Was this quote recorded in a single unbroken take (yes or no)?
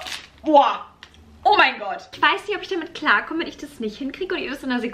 no